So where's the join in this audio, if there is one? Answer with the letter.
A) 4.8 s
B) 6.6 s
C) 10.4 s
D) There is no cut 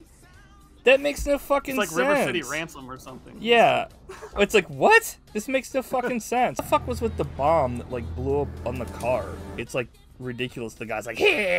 B